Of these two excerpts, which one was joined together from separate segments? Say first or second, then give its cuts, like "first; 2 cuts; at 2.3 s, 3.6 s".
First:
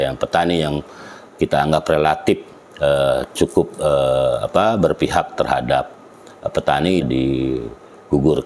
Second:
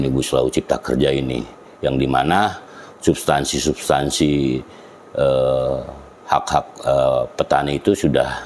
first; 1 cut; at 7.1 s